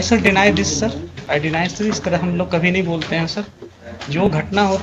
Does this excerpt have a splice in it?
yes; 1 cut; at 1.1 s

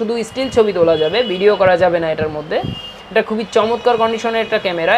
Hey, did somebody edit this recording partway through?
no; 0 cuts

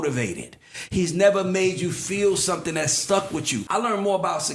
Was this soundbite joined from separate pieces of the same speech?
yes; 1 cut; at 3.5 s

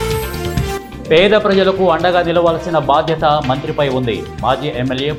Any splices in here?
no; 0 cuts

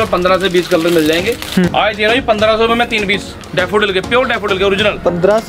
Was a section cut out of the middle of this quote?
yes; 1 cut; at 1.7 s

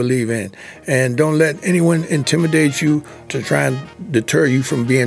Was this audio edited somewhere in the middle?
no; 0 cuts

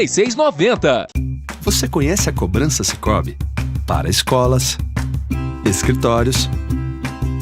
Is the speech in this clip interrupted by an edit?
yes; 1 cut; at 1.2 s

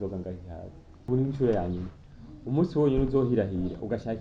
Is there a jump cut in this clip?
yes; 1 cut; at 1.0 s

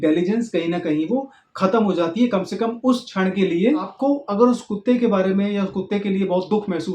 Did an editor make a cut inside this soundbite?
yes; 1 cut; at 3.9 s

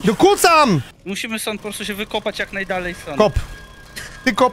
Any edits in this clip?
yes; 1 cut; at 0.9 s

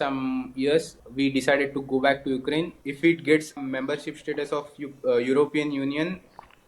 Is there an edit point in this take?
yes; 3 cuts; at 1.0 s, 2.8 s, 3.6 s

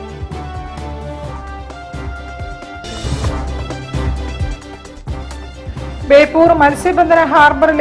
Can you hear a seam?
no; 0 cuts

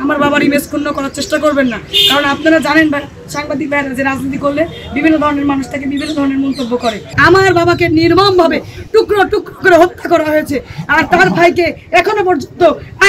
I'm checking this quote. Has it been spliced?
yes; 1 cut; at 7.1 s

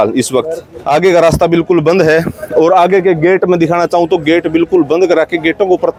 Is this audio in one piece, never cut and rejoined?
yes; 0 cuts

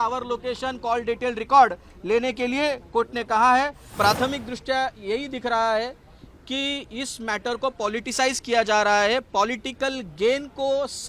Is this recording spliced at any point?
yes; 1 cut; at 3.8 s

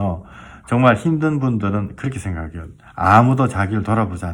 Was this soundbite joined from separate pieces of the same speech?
no; 0 cuts

